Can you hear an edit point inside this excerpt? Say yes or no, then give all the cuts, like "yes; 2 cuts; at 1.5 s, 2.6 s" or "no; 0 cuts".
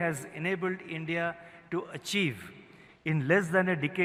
no; 0 cuts